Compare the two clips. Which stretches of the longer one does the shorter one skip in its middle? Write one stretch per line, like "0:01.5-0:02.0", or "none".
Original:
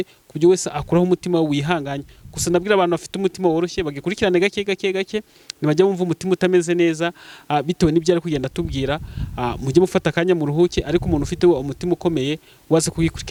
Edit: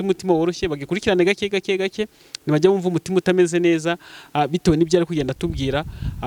none